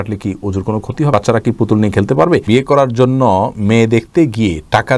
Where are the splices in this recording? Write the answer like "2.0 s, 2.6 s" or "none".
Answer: 1.1 s, 2.4 s